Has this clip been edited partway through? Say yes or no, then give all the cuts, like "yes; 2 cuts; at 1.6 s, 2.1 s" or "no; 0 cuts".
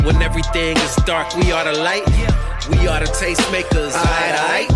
no; 0 cuts